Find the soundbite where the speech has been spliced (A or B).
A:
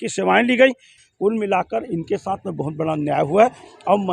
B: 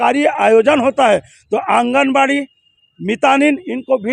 A